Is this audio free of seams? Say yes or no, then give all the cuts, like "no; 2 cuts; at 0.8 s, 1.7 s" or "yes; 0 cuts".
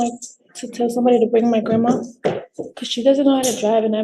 yes; 0 cuts